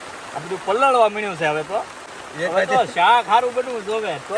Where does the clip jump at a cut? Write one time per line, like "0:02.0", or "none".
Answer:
0:02.2